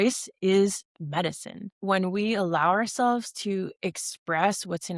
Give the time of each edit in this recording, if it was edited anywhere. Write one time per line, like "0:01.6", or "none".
0:01.7